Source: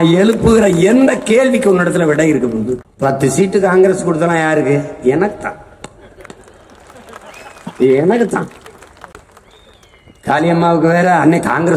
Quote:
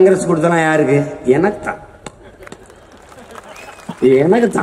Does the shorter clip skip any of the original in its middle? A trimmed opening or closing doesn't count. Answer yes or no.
no